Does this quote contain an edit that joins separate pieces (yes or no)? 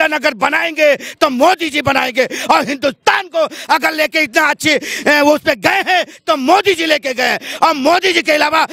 no